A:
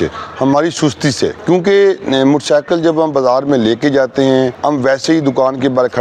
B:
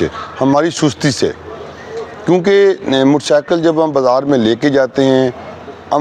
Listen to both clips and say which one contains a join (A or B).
A